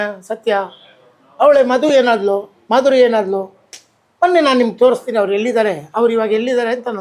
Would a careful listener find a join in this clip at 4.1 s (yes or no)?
no